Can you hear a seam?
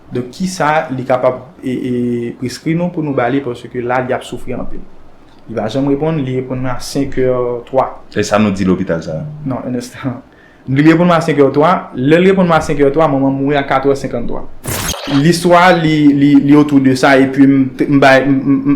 yes; 1 cut; at 15.1 s

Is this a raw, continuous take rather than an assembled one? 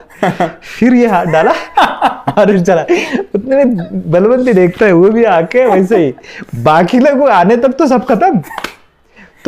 yes; 0 cuts

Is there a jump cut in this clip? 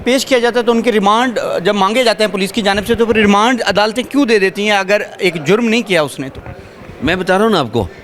no; 0 cuts

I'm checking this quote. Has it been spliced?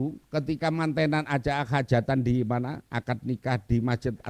no; 0 cuts

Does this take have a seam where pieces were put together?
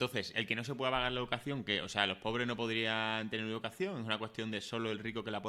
no; 0 cuts

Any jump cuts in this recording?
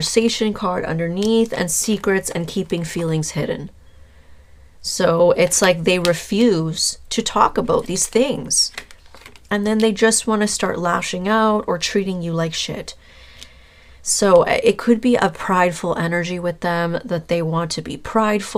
no; 0 cuts

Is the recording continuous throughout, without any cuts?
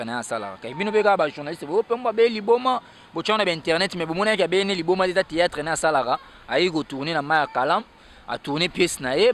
yes; 0 cuts

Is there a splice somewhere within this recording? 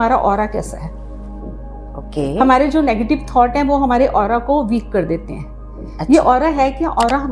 no; 0 cuts

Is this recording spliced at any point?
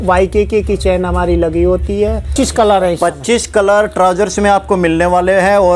yes; 1 cut; at 2.3 s

